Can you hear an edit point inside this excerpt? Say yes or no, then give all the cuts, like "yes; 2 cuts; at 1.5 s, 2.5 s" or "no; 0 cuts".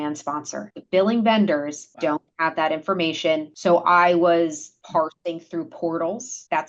yes; 3 cuts; at 1.8 s, 3.5 s, 4.7 s